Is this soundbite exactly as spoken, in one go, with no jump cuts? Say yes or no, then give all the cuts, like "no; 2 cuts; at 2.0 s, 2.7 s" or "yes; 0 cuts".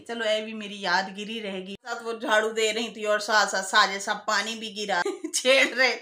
no; 2 cuts; at 1.7 s, 5.1 s